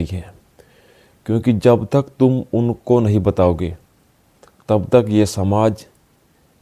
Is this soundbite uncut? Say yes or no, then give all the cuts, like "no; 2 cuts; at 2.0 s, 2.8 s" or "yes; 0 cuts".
yes; 0 cuts